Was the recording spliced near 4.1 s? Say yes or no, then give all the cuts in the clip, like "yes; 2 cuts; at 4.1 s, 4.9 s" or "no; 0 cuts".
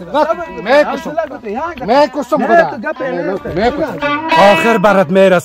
yes; 1 cut; at 4.1 s